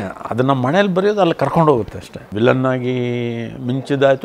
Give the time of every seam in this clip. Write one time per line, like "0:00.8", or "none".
0:02.2